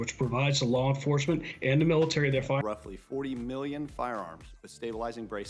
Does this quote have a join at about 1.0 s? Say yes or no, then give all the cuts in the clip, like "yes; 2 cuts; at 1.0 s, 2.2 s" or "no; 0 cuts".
no; 1 cut; at 2.6 s